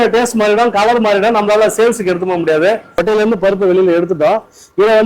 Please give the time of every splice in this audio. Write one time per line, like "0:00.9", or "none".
0:02.9